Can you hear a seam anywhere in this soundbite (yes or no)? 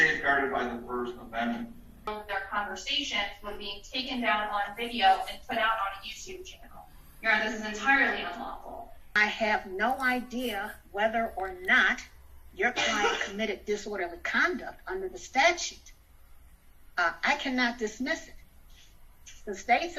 yes